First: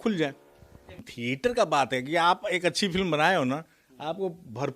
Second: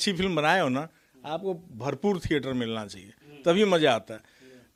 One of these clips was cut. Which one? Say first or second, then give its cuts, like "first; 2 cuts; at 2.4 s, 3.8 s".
first; 1 cut; at 0.9 s